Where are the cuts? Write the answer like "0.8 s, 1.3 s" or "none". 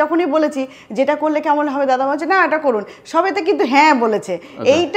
none